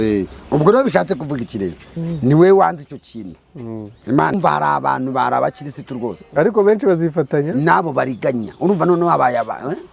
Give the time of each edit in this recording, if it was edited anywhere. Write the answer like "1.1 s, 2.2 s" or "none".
4.3 s